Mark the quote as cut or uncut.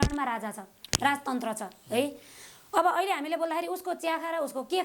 uncut